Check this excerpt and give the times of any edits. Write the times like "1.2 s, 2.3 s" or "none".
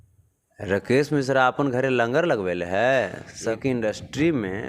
3.4 s